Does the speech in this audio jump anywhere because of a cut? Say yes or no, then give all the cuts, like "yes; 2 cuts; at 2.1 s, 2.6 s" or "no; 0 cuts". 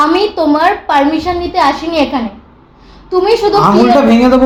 no; 0 cuts